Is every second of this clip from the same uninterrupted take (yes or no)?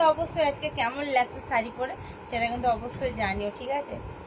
yes